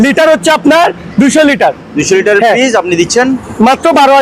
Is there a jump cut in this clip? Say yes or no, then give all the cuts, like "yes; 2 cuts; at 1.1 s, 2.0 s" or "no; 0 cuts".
no; 0 cuts